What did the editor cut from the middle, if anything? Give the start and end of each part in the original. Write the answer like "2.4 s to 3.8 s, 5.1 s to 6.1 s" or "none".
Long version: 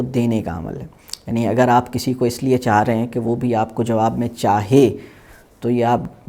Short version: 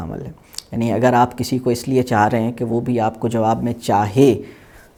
none